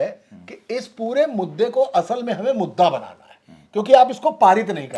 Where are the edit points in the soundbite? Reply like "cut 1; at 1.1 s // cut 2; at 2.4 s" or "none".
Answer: none

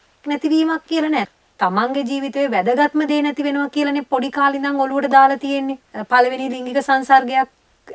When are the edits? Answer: cut 1; at 1.3 s // cut 2; at 5.9 s

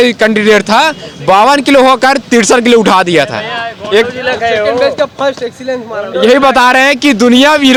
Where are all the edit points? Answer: none

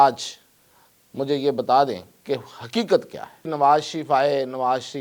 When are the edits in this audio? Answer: cut 1; at 3.5 s

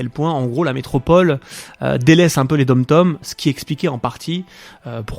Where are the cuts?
cut 1; at 3.2 s

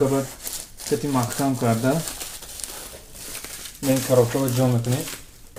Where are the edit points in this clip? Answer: none

